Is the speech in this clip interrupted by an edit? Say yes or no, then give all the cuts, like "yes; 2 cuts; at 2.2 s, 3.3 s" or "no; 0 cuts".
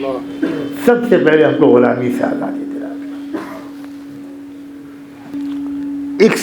yes; 1 cut; at 5.3 s